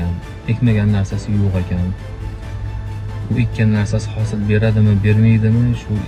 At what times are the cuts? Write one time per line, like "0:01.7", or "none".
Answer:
none